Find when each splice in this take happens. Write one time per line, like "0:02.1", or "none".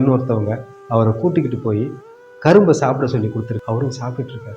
0:03.6